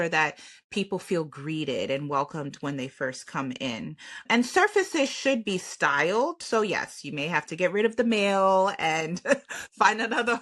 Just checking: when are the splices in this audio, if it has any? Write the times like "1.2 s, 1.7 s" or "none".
none